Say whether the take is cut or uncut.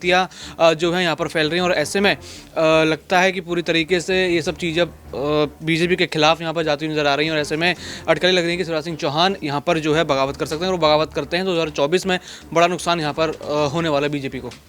uncut